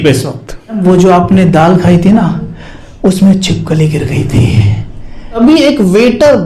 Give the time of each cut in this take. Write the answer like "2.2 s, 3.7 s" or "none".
0.8 s, 5.4 s